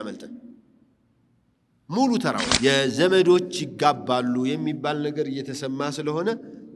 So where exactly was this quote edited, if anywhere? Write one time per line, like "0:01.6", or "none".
0:02.5